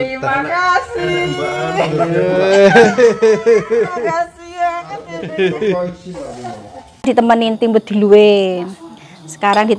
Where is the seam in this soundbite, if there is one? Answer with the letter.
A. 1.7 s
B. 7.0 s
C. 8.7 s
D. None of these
B